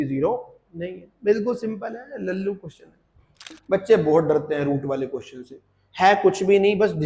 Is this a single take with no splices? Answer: no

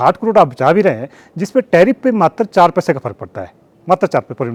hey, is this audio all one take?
yes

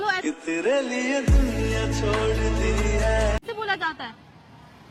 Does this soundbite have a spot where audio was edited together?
no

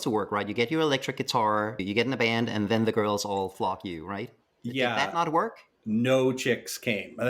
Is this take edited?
no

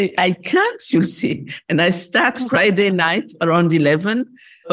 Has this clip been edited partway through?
no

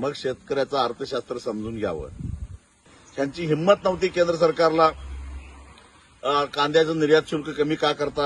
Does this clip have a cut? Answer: yes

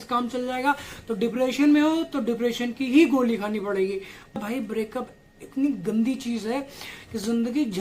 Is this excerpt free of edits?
no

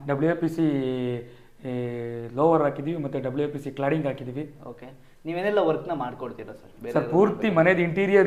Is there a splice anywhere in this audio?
no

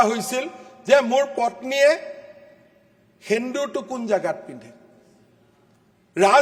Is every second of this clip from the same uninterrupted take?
yes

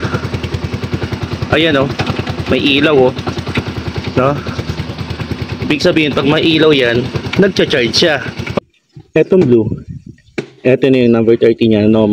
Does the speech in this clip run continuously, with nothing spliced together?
no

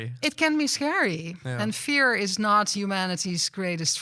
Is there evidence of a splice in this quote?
no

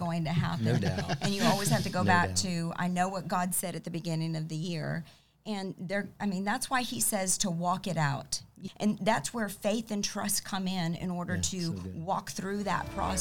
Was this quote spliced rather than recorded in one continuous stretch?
yes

